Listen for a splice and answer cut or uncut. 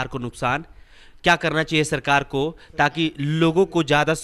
uncut